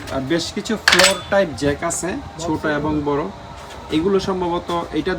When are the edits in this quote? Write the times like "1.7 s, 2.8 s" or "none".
none